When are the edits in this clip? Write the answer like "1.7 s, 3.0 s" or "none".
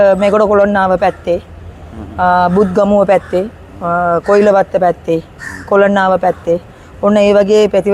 none